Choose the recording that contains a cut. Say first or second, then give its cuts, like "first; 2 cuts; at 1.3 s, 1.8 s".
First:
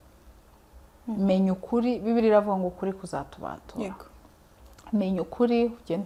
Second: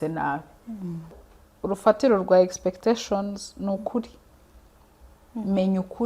second; 1 cut; at 1.3 s